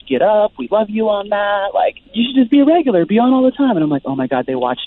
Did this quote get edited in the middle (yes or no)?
yes